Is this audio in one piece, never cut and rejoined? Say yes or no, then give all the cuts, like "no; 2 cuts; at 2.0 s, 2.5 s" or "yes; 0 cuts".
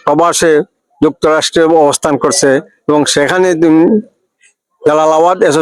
yes; 0 cuts